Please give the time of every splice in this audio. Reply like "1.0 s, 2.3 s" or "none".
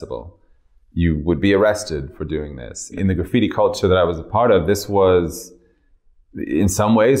3.0 s